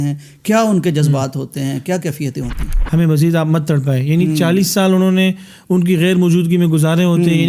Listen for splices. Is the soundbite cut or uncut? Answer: cut